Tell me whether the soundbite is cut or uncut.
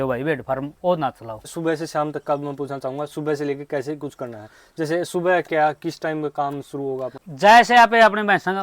cut